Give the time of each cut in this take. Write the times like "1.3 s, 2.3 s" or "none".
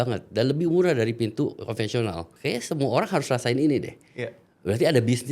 2.3 s